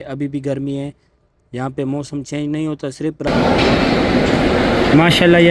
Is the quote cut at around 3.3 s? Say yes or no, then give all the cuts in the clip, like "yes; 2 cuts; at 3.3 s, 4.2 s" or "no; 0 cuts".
yes; 1 cut; at 3.3 s